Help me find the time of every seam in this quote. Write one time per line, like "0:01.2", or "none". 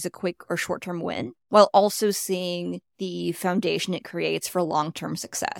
0:01.4
0:02.9